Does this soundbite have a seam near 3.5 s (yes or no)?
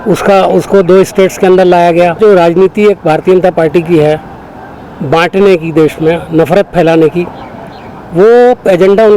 no